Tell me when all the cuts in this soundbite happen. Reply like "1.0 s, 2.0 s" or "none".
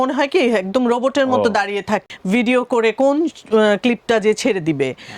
2.0 s